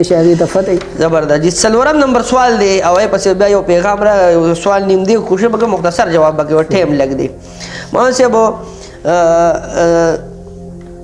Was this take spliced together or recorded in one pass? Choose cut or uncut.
uncut